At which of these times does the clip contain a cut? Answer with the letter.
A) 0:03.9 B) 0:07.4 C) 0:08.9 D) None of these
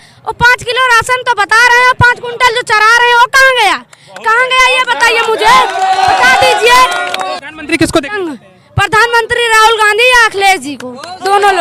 B